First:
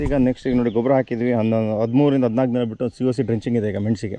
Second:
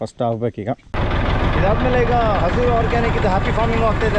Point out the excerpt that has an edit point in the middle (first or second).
second